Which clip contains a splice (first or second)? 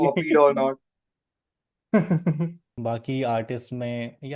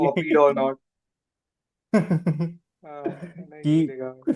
first